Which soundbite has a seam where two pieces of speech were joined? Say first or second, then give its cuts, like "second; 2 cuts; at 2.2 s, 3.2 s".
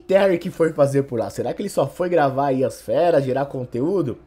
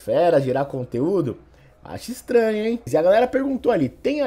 second; 1 cut; at 2.8 s